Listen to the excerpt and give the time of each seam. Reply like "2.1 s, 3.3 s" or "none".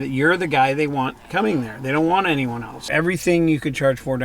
2.8 s